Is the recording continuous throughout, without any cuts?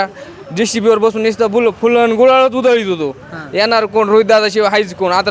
yes; 0 cuts

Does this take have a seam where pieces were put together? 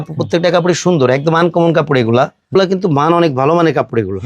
yes; 1 cut; at 2.5 s

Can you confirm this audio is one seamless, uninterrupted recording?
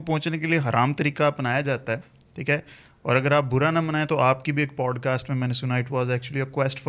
yes; 0 cuts

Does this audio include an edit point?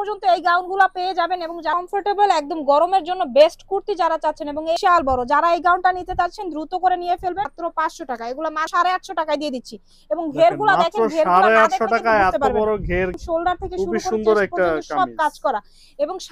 yes; 5 cuts; at 1.7 s, 4.8 s, 7.5 s, 8.7 s, 13.1 s

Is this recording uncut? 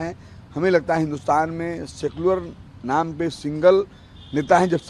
yes; 0 cuts

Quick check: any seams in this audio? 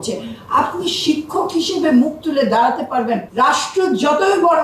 yes; 1 cut; at 3.2 s

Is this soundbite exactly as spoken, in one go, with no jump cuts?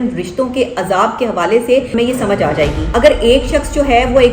no; 2 cuts; at 1.9 s, 2.8 s

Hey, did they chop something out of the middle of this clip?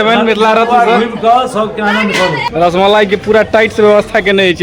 yes; 1 cut; at 2.4 s

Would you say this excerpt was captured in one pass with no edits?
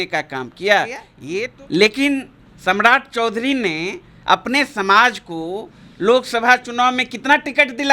no; 1 cut; at 1.1 s

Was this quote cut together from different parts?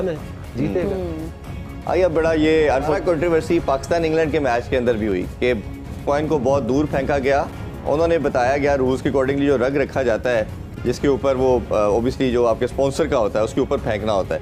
no; 0 cuts

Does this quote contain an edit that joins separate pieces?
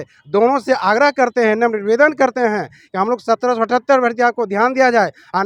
no; 0 cuts

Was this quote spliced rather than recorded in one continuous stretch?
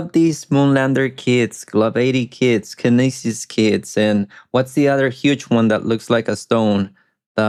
no; 0 cuts

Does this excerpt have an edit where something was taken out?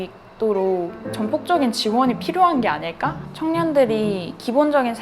yes; 1 cut; at 3.2 s

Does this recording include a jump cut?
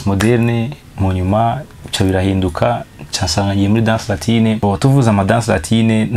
yes; 1 cut; at 4.6 s

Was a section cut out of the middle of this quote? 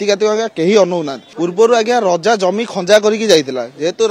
yes; 1 cut; at 1.2 s

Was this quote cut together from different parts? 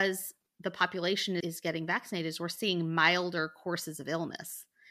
no; 0 cuts

